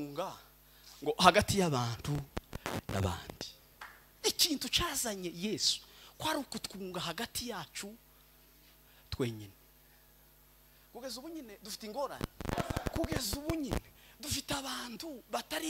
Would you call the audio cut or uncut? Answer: cut